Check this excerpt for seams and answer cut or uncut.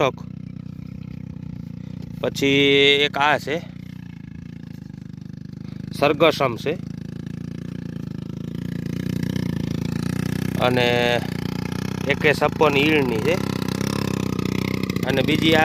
uncut